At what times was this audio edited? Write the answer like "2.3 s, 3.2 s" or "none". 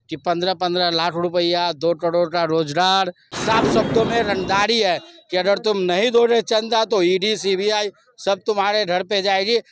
3.3 s